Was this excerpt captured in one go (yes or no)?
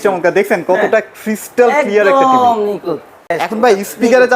no